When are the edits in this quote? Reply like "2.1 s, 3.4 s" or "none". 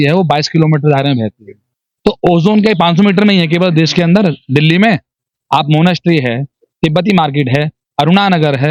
none